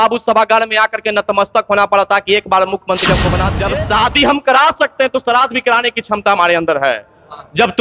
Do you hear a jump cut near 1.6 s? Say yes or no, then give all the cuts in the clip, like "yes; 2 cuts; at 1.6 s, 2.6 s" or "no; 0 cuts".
no; 1 cut; at 3.5 s